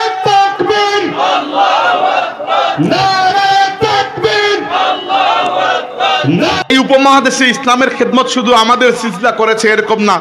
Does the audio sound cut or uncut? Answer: cut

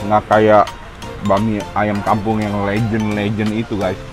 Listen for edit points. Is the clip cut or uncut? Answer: uncut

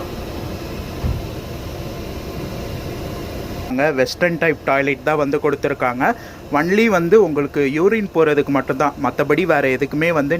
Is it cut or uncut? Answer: cut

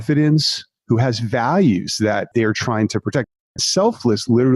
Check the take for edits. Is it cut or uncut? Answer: cut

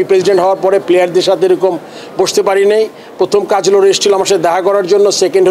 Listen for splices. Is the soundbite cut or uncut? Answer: uncut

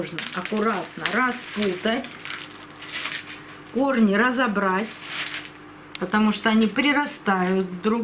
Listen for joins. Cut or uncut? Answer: uncut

